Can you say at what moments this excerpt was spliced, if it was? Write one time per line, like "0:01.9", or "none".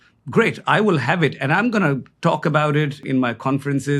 0:03.0